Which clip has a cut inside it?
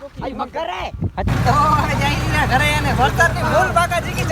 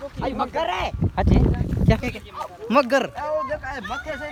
first; 1 cut; at 1.3 s

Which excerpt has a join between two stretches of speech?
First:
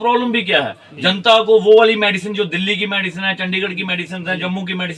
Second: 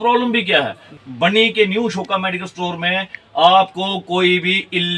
second; 1 cut; at 1.0 s

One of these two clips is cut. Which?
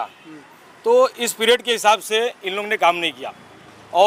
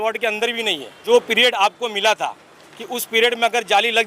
second; 1 cut; at 1.0 s

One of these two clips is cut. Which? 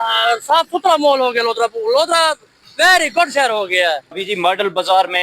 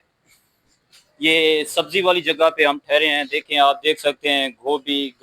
first; 1 cut; at 4.2 s

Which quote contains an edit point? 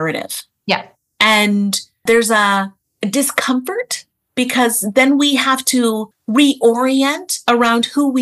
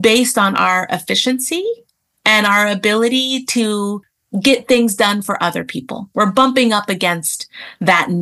first; 3 cuts; at 2.0 s, 2.8 s, 6.1 s

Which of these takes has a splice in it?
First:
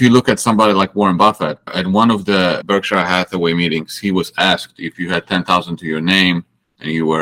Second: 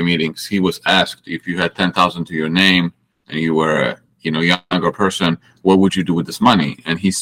first; 2 cuts; at 1.7 s, 2.6 s

